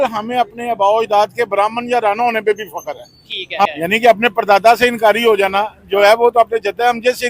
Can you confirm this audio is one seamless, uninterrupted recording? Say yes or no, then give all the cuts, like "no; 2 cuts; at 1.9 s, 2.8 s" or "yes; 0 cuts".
no; 1 cut; at 3.7 s